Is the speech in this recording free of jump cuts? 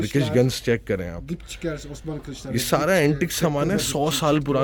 yes; 0 cuts

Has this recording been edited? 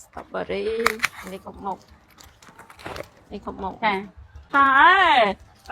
yes; 1 cut; at 4.5 s

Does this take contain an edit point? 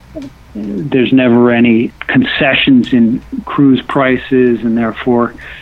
no; 0 cuts

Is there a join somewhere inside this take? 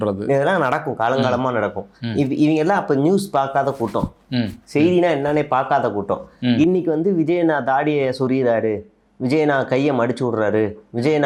no; 0 cuts

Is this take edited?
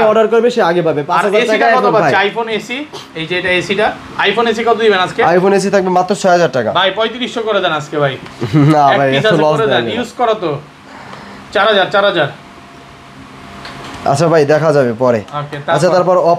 no; 0 cuts

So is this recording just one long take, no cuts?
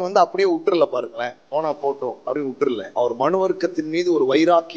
no; 1 cut; at 2.9 s

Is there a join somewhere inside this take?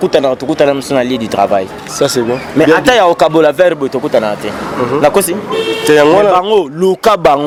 no; 0 cuts

